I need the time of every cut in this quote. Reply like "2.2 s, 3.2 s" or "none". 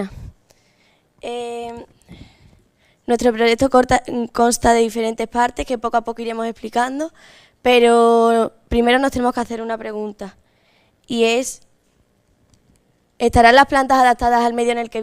12.2 s